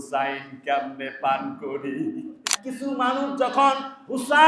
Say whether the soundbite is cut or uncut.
cut